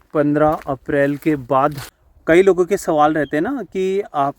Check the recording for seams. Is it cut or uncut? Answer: cut